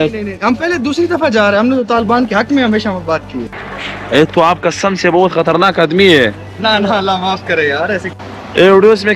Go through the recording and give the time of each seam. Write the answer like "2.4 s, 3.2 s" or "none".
3.6 s, 8.1 s